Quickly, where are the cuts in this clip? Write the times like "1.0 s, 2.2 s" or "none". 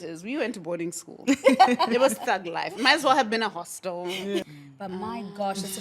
4.4 s